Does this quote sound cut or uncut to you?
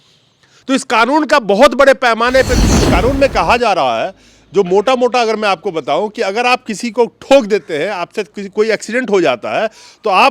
cut